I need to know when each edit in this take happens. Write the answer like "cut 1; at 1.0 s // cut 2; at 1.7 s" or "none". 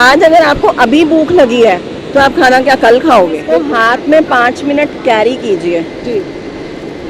cut 1; at 3.5 s

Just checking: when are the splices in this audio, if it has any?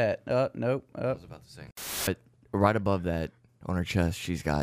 cut 1; at 2.1 s

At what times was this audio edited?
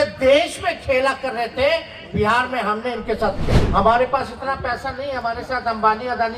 cut 1; at 3.4 s

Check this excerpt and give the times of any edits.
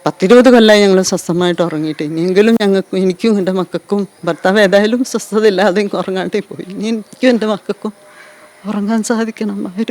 none

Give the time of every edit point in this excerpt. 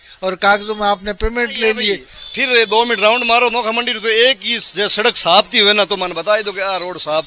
cut 1; at 2.1 s

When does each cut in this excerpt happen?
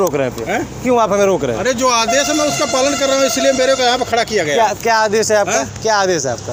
none

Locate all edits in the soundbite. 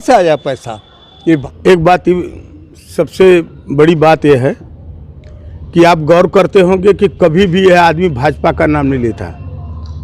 cut 1; at 1.4 s

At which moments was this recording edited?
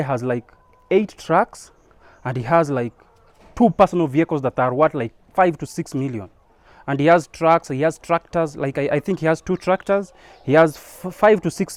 none

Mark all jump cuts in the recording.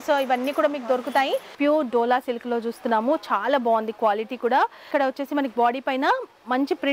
cut 1; at 1.5 s // cut 2; at 4.9 s

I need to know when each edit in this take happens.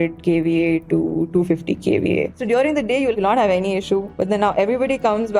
cut 1; at 2.8 s // cut 2; at 4.1 s

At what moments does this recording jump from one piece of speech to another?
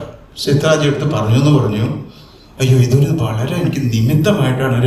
none

